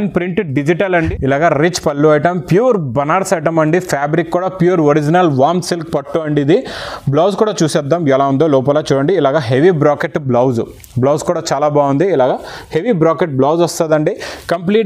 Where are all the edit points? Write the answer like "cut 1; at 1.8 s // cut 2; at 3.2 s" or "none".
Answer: cut 1; at 1.1 s